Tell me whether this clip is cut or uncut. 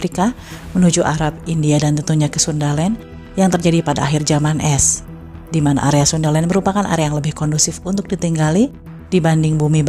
uncut